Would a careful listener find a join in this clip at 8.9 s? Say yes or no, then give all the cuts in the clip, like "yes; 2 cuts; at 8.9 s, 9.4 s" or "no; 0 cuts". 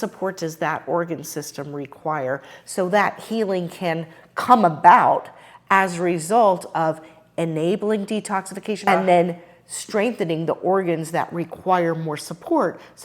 yes; 1 cut; at 8.9 s